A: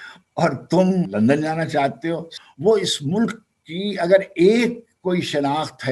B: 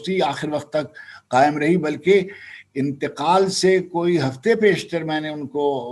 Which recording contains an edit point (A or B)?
A